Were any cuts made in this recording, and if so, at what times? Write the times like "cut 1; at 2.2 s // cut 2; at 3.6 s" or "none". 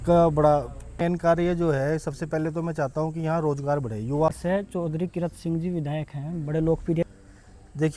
cut 1; at 1.0 s // cut 2; at 4.3 s // cut 3; at 7.0 s